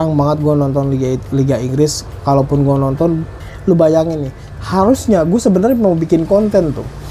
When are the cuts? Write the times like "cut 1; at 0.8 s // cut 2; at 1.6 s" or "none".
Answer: cut 1; at 3.5 s

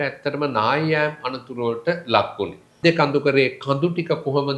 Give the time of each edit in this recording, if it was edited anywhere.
cut 1; at 2.8 s

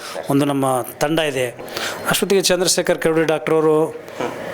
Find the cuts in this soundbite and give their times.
cut 1; at 1.7 s

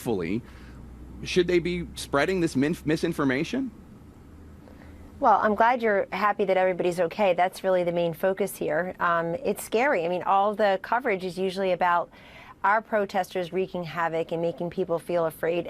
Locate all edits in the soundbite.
cut 1; at 6.1 s

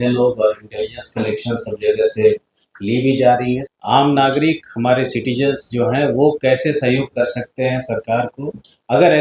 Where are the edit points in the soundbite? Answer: cut 1; at 3.7 s

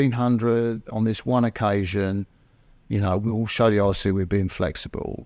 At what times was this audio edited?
none

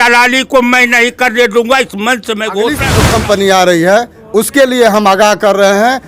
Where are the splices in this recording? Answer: cut 1; at 2.9 s

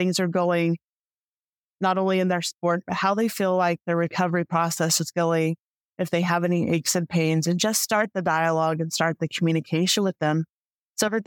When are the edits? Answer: none

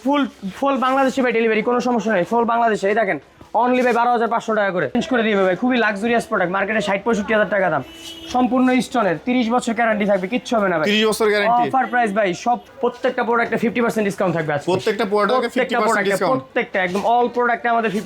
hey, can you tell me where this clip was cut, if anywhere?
cut 1; at 4.9 s // cut 2; at 12.6 s

